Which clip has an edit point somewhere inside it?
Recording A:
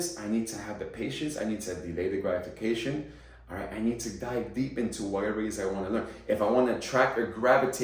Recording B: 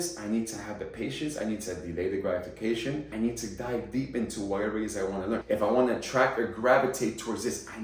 B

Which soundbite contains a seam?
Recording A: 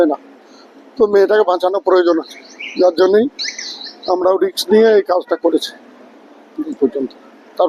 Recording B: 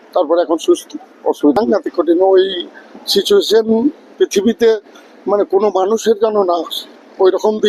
B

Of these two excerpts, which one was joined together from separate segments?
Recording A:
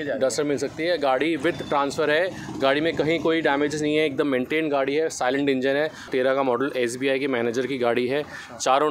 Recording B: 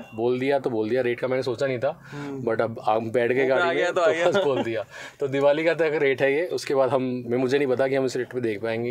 A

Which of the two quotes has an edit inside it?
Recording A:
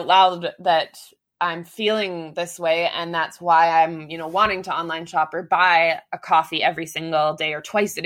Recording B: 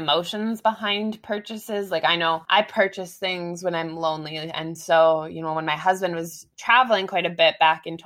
B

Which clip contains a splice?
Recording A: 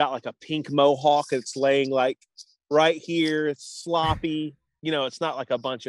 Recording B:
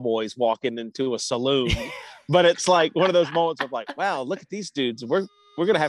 A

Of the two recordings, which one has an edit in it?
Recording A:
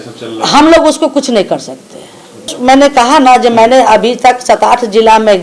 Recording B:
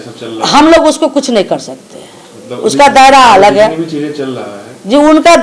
A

